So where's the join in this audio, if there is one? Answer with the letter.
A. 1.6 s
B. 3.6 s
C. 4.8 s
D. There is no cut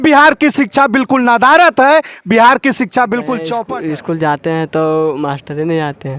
B